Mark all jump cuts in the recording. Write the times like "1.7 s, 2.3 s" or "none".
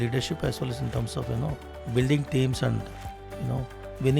1.7 s